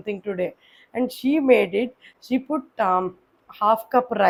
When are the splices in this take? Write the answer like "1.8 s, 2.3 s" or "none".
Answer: none

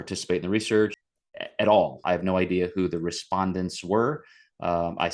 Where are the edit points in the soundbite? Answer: 1.1 s, 2.0 s

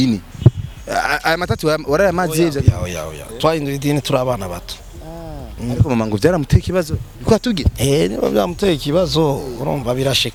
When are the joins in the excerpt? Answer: none

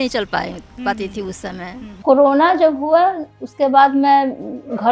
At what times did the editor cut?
2.0 s

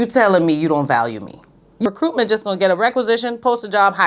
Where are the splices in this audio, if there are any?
1.9 s

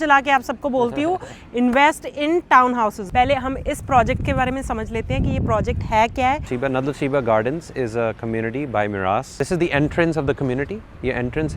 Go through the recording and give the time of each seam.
3.0 s, 6.5 s, 9.3 s

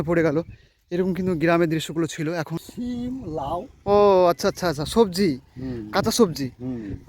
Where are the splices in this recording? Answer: 2.6 s

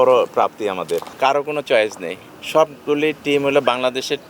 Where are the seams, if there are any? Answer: 1.1 s

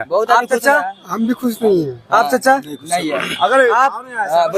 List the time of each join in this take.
none

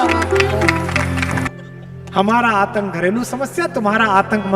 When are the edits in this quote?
1.5 s

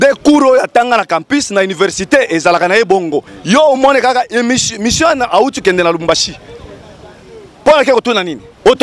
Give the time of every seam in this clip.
3.2 s

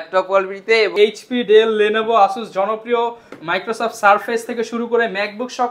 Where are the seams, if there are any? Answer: 0.9 s

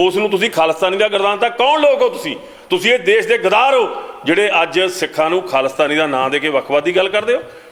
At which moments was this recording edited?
none

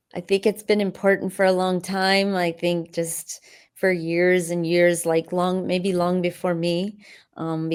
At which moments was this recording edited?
none

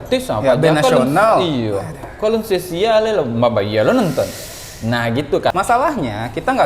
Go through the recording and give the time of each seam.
5.5 s

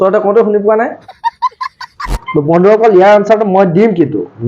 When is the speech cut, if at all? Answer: 2.2 s

